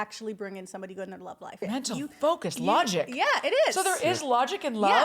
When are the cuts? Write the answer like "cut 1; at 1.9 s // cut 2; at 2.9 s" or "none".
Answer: cut 1; at 1.6 s